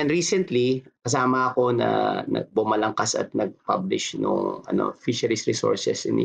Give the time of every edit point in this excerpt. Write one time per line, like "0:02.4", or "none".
0:00.9